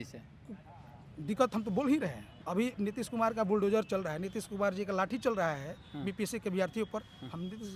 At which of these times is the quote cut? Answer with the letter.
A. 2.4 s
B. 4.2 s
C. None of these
A